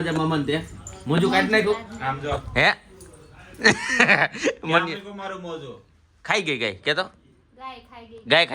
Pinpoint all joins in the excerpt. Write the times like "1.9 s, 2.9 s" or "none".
none